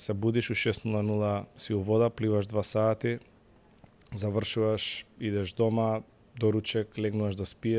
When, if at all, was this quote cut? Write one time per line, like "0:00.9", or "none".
none